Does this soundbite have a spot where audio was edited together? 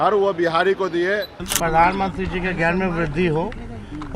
yes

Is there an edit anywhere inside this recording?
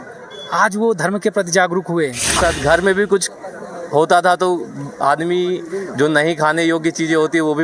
yes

